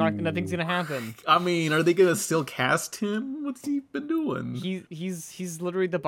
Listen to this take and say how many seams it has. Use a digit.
1